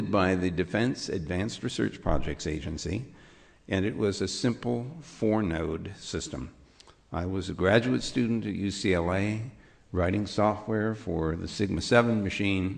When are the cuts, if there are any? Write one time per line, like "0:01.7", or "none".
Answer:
0:06.2